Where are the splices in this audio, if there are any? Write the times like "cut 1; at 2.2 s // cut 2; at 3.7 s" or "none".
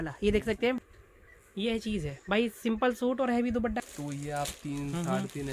cut 1; at 0.8 s // cut 2; at 3.8 s